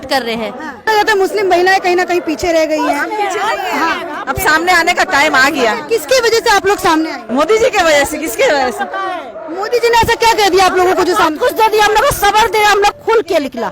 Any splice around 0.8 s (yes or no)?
yes